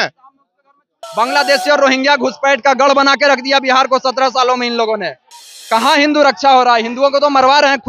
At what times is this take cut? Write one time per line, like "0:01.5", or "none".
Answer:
0:01.0